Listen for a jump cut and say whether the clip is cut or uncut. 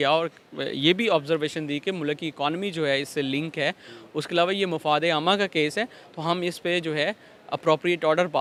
uncut